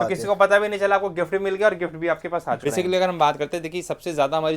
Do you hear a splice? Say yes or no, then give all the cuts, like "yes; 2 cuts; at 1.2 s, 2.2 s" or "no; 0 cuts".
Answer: yes; 1 cut; at 2.6 s